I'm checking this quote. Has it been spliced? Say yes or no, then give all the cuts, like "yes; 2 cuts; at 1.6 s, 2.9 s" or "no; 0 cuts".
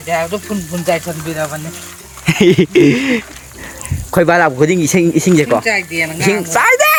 no; 0 cuts